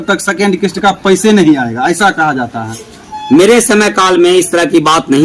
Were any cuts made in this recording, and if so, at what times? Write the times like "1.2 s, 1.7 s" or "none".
none